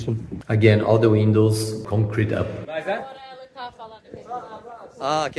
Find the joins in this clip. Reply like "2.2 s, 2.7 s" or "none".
2.6 s